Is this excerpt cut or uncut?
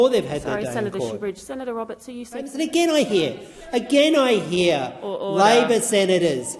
cut